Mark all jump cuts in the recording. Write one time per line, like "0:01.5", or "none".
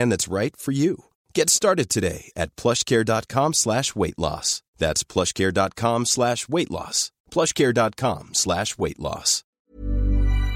0:09.4